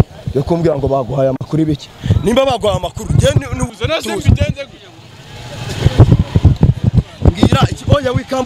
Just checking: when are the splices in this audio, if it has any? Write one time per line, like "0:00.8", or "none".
0:03.7